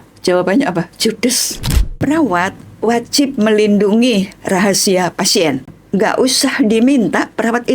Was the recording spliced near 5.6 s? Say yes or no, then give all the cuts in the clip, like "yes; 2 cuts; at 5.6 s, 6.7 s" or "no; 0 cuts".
yes; 2 cuts; at 1.9 s, 5.6 s